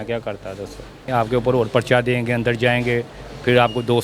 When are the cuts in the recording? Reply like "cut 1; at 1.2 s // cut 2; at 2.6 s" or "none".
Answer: cut 1; at 1.1 s